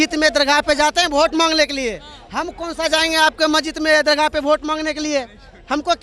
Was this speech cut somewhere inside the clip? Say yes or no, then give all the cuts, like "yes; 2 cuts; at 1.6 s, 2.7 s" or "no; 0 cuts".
no; 0 cuts